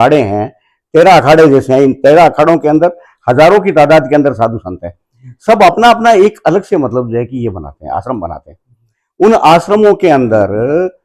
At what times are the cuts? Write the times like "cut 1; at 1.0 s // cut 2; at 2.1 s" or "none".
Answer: none